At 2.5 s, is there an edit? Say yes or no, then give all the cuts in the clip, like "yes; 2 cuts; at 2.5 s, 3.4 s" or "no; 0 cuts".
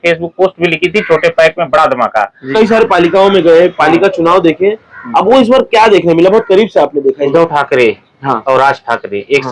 yes; 2 cuts; at 2.5 s, 7.3 s